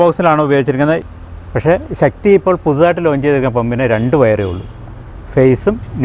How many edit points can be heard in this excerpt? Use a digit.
1